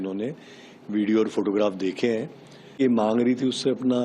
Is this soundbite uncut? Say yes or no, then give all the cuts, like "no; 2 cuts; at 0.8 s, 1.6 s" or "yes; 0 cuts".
no; 1 cut; at 2.8 s